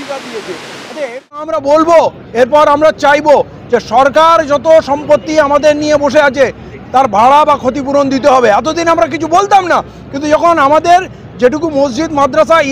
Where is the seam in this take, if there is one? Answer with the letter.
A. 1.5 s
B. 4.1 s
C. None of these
A